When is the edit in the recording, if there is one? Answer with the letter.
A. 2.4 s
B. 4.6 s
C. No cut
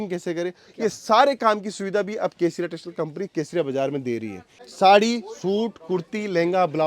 B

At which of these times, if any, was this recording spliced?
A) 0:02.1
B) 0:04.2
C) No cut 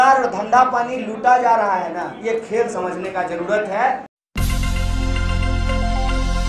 B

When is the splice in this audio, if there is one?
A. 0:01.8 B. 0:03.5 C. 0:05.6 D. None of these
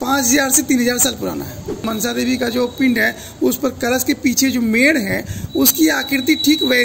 A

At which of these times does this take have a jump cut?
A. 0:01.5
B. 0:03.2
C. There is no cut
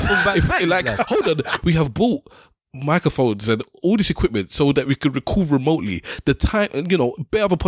A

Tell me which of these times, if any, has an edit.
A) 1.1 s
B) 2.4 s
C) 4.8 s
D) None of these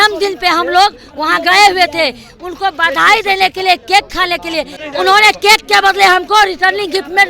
C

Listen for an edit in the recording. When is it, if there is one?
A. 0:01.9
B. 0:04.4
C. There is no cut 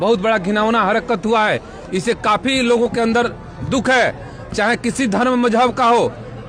C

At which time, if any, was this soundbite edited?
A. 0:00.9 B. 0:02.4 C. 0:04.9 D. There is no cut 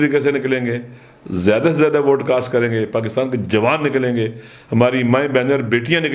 D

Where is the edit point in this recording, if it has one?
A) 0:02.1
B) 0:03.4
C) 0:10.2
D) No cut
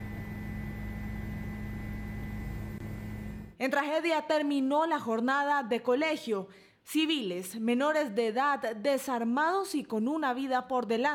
B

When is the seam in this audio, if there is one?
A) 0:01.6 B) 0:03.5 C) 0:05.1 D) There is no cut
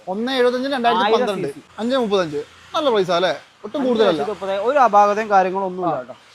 A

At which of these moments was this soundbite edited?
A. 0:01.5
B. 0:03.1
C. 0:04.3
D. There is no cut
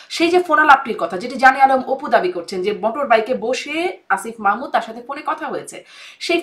D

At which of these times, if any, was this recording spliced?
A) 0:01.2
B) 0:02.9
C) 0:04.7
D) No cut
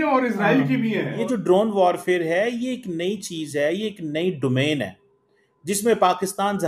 A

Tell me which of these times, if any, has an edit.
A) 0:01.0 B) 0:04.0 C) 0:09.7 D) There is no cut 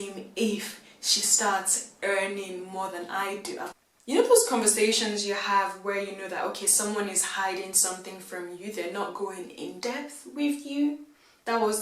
B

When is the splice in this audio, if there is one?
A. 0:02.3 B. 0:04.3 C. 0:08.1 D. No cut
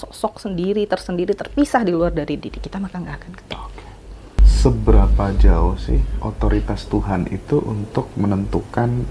B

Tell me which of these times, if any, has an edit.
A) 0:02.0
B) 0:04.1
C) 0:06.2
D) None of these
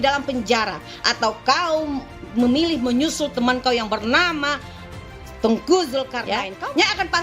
C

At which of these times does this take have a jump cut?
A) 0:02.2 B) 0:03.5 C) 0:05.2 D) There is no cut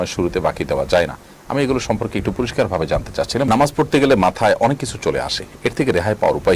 B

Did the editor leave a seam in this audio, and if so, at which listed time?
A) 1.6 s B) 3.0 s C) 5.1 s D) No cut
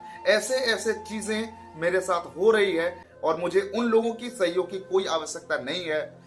B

